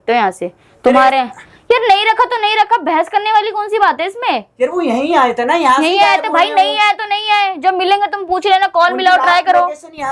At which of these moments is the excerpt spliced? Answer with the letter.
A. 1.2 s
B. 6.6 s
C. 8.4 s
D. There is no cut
D